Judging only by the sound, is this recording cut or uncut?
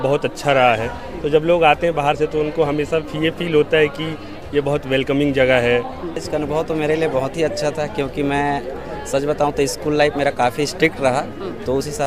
cut